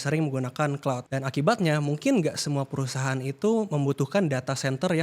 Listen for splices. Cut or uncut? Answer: cut